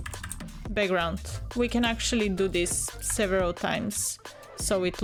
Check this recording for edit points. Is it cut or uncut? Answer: uncut